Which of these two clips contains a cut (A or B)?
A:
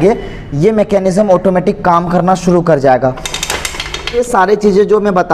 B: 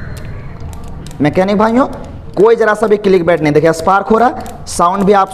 A